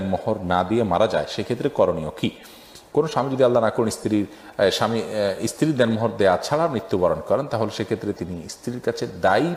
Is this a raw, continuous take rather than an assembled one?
yes; 0 cuts

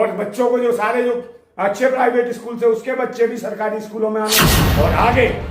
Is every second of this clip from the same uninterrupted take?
no; 1 cut; at 4.4 s

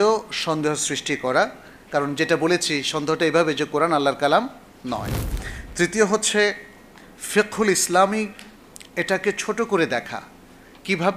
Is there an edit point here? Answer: no; 0 cuts

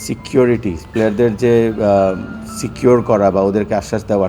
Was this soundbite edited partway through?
no; 0 cuts

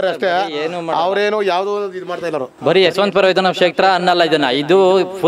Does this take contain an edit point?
no; 0 cuts

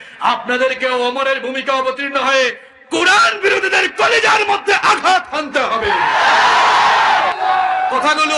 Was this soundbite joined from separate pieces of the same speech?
yes; 1 cut; at 7.3 s

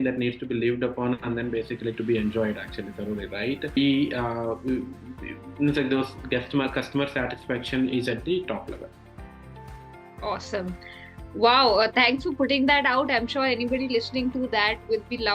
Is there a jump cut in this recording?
yes; 1 cut; at 3.8 s

